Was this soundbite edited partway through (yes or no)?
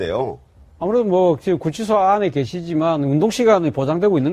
no